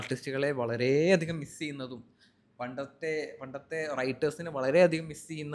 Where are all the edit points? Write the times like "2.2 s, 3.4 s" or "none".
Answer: none